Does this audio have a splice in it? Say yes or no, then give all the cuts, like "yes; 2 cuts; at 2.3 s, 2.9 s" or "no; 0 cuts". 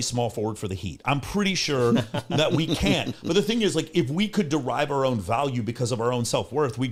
no; 0 cuts